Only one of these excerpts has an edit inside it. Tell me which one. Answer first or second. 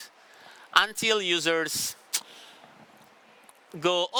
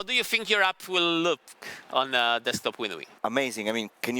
second